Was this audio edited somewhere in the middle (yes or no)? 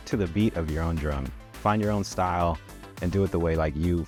no